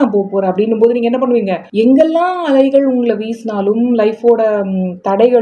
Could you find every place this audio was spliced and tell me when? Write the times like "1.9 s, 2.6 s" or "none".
1.6 s